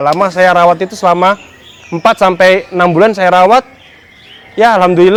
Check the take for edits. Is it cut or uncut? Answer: uncut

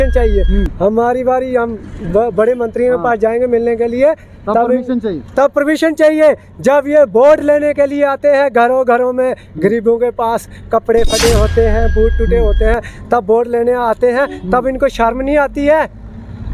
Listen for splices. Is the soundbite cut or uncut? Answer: uncut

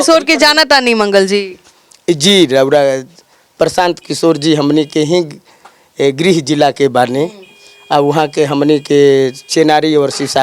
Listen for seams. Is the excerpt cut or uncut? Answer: uncut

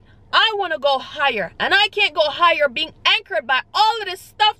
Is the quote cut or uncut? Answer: uncut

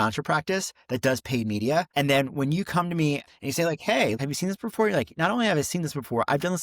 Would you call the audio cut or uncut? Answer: cut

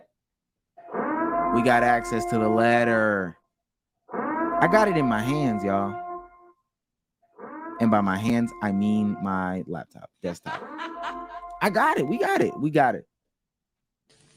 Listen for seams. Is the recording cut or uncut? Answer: uncut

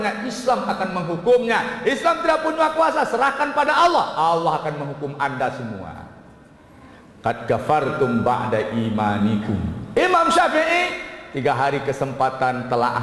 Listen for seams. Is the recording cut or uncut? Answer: uncut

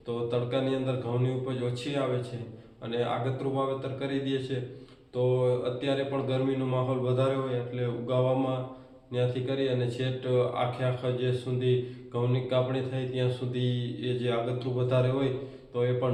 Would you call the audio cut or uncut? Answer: uncut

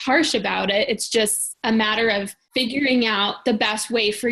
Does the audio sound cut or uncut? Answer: cut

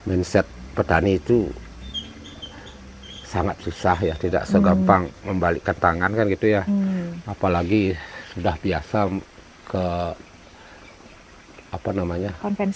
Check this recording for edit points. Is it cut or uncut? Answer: uncut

